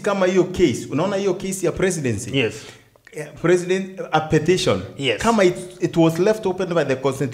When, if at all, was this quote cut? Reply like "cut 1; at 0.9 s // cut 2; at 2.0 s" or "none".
none